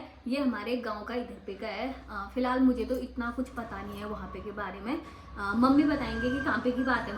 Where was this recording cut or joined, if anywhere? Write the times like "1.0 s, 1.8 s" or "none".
none

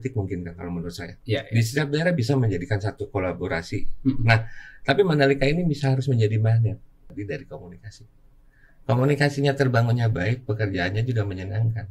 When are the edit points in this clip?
7.1 s

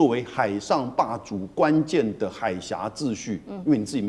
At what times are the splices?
none

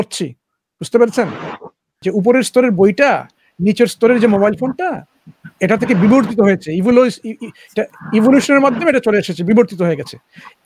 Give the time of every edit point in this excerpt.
2.0 s

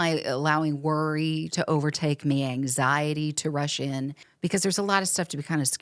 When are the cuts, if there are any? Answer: 4.2 s

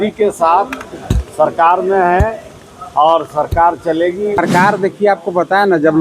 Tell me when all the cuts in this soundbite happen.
4.4 s

